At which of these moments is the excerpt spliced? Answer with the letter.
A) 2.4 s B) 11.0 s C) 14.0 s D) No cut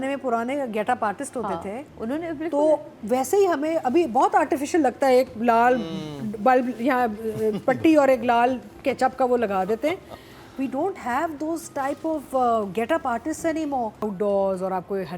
C